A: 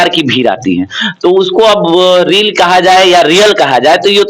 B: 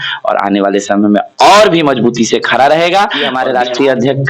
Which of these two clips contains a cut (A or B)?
B